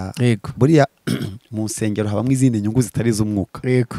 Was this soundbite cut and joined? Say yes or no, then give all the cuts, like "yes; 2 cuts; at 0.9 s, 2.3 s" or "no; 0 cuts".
no; 0 cuts